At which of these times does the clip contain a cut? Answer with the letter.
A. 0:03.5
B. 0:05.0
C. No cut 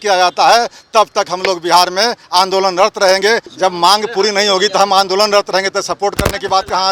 A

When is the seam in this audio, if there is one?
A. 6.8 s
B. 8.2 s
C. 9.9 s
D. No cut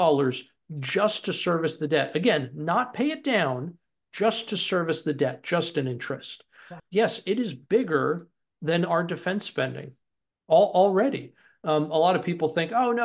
A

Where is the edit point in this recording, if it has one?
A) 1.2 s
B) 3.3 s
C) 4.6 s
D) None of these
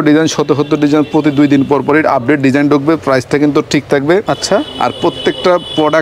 D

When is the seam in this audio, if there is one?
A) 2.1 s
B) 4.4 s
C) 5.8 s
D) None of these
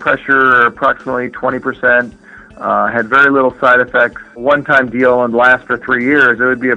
B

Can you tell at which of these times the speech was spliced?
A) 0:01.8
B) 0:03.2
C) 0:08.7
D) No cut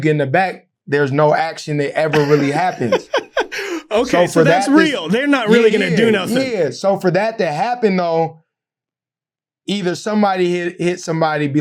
D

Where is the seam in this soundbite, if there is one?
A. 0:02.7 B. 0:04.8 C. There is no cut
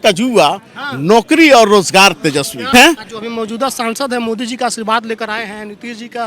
A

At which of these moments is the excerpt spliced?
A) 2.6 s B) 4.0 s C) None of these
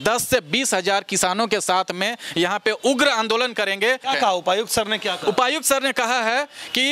B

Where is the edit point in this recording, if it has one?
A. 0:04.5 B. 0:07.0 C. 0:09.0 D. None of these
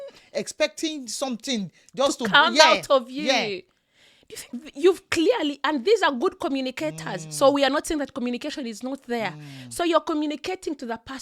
A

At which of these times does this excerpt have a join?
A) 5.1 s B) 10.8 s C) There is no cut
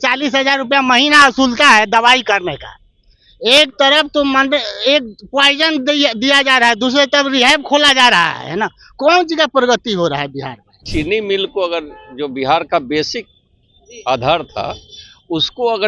B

